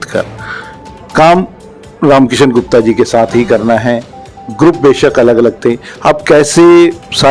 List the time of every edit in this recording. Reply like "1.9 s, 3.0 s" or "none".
none